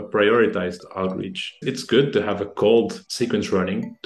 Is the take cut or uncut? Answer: cut